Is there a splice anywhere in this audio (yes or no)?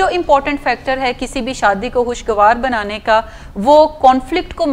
no